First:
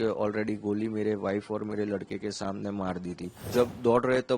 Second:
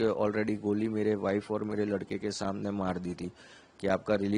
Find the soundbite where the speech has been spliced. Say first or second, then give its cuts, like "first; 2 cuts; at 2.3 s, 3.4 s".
first; 1 cut; at 3.4 s